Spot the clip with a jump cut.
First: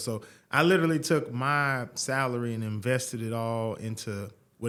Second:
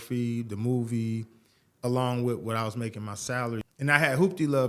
second; 1 cut; at 3.7 s

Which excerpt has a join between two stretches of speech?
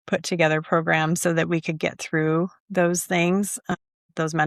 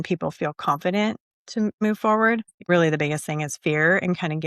second; 2 cuts; at 1.8 s, 2.7 s

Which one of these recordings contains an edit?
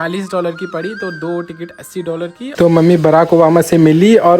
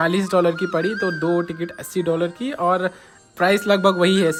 first; 1 cut; at 2.4 s

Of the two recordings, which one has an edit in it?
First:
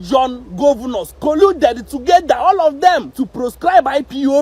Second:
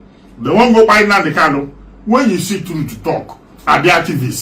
first; 1 cut; at 3.2 s

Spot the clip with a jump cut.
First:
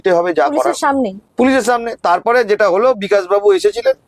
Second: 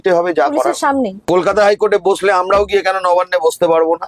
second; 1 cut; at 1.2 s

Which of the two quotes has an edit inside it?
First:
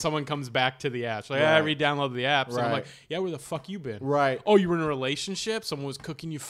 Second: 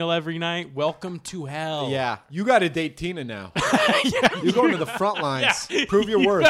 second; 1 cut; at 2.2 s

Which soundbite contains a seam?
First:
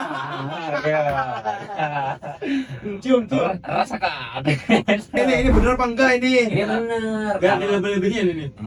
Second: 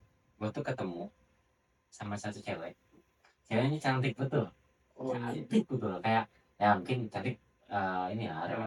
first; 1 cut; at 5.2 s

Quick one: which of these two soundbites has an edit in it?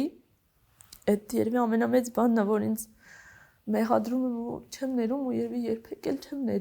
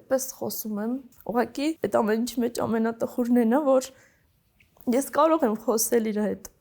second; 2 cuts; at 1.1 s, 1.8 s

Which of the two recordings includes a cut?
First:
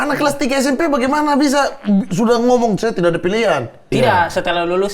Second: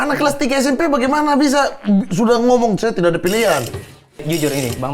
second; 1 cut; at 4.0 s

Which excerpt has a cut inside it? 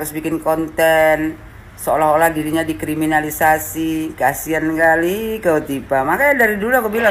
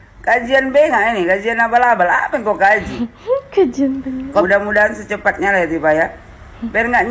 second; 1 cut; at 4.4 s

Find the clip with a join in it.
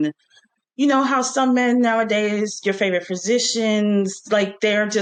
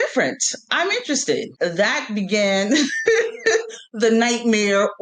second; 1 cut; at 1.5 s

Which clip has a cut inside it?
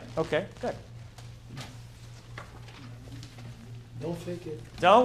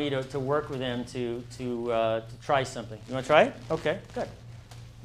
first; 1 cut; at 2.6 s

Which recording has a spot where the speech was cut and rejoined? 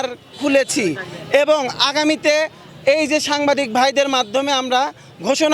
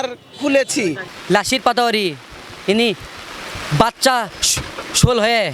second; 1 cut; at 1.1 s

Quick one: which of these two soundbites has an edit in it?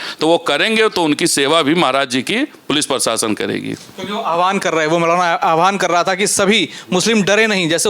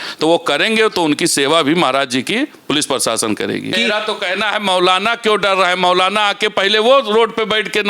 second; 1 cut; at 3.7 s

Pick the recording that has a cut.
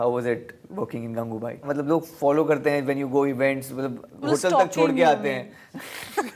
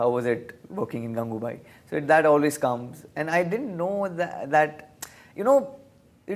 first; 1 cut; at 1.7 s

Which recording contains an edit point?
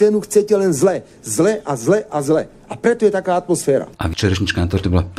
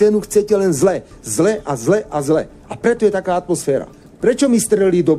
second; 1 cut; at 4.0 s

